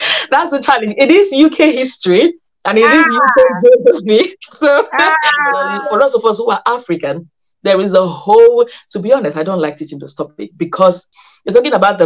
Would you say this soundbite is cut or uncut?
cut